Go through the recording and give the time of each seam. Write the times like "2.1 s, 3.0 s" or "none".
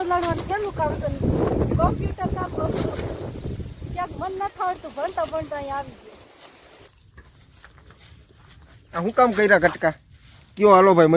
6.9 s